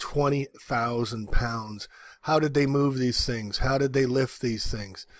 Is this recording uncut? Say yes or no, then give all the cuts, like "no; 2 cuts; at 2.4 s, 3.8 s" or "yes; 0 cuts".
yes; 0 cuts